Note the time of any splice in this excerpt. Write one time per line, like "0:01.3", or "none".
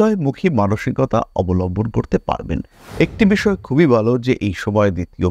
0:02.8